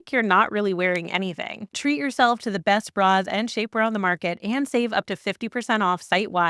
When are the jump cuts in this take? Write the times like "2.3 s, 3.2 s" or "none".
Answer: 1.6 s